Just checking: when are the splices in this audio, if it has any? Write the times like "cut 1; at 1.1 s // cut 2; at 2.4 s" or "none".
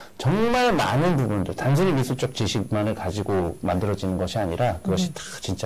none